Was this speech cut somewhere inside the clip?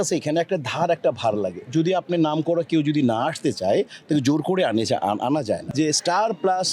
yes; 1 cut; at 5.7 s

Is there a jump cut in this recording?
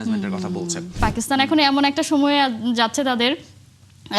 yes; 1 cut; at 1.0 s

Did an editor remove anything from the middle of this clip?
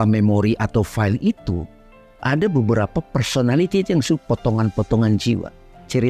no; 0 cuts

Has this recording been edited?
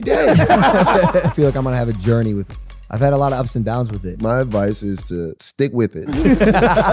yes; 4 cuts; at 1.3 s, 2.5 s, 4.0 s, 5.9 s

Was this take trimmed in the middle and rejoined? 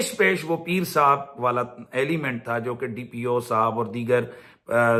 no; 0 cuts

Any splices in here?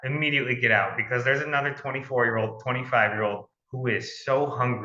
no; 0 cuts

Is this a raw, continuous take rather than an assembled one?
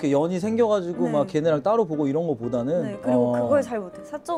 yes; 0 cuts

